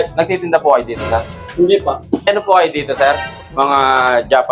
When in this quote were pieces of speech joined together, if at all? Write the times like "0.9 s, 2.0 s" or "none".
1.4 s, 2.3 s